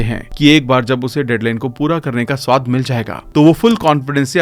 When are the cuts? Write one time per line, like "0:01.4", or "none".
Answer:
none